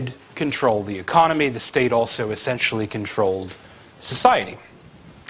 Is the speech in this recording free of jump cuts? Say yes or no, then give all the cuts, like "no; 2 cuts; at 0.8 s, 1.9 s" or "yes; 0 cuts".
yes; 0 cuts